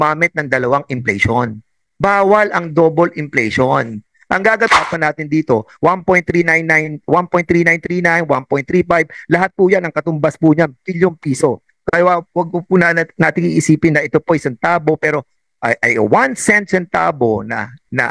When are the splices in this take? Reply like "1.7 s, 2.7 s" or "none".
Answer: 4.8 s

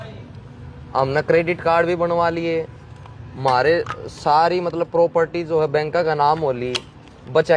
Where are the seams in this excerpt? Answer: none

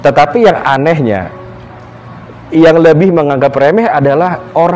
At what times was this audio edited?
none

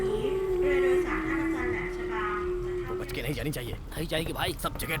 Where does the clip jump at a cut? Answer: 3.1 s

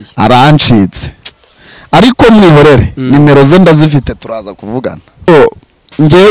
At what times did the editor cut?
5.3 s

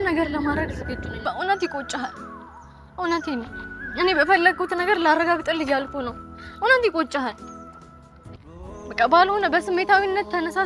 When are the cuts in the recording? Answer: 1.1 s

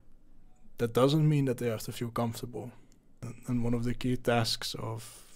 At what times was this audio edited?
3.3 s

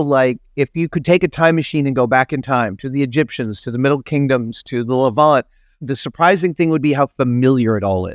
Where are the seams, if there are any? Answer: 5.8 s

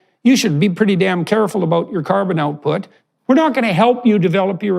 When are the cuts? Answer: 2.9 s

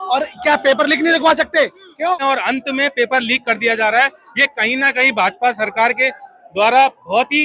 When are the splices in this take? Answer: 2.2 s

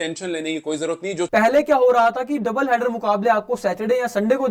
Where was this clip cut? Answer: 1.3 s

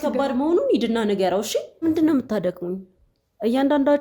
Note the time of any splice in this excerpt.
1.8 s

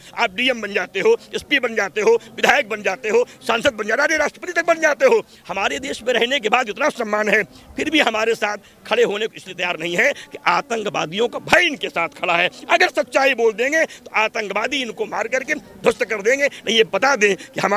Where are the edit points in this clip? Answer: none

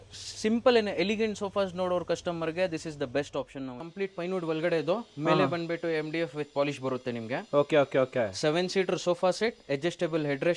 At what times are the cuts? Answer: 3.8 s

